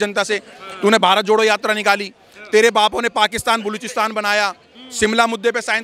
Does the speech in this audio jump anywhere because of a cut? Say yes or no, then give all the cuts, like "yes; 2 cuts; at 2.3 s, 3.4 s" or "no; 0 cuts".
no; 0 cuts